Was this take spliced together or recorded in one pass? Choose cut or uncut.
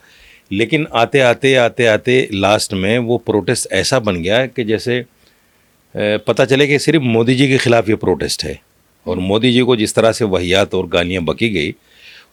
uncut